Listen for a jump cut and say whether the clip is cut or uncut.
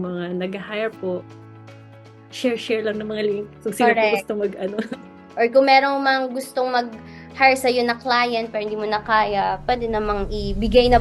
cut